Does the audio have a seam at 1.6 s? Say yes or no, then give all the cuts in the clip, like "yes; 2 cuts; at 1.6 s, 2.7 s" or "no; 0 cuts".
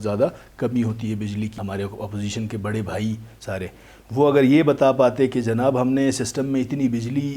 yes; 1 cut; at 1.6 s